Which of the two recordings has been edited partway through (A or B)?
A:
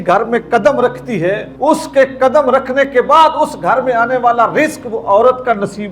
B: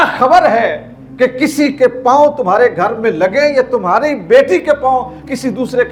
A